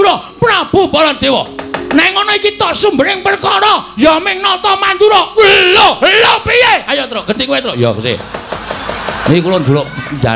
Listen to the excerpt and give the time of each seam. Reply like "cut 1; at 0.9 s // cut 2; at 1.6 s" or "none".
none